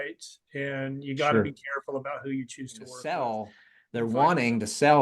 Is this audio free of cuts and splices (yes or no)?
no